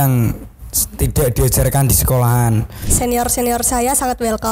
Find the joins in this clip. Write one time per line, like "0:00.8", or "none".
0:02.9